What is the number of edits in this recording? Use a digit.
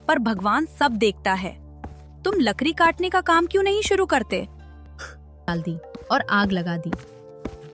1